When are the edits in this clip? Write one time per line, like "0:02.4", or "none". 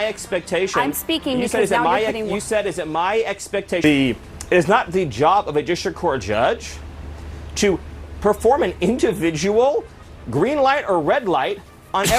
0:03.8